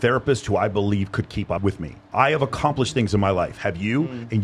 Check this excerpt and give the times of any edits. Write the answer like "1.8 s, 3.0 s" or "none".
2.0 s